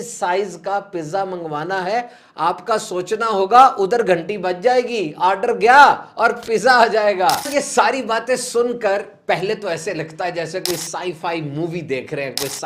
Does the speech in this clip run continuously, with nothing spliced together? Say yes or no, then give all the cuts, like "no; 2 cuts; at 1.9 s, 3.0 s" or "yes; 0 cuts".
no; 1 cut; at 7.5 s